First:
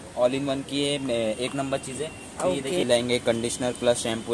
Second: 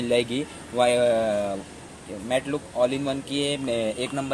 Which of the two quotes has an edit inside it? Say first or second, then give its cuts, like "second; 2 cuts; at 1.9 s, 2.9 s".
first; 1 cut; at 2.8 s